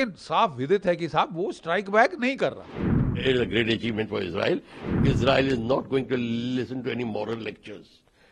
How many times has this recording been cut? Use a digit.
2